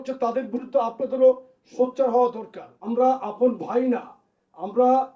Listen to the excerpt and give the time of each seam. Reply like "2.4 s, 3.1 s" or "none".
2.7 s